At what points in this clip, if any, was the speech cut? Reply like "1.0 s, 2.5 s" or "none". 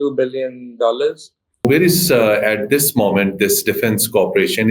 1.6 s